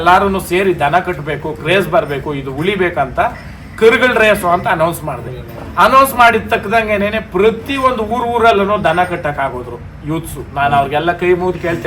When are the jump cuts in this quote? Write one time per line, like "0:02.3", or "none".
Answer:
none